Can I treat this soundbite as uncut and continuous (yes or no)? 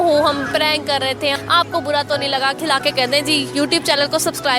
no